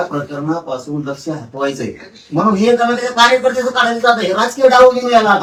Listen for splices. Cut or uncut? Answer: uncut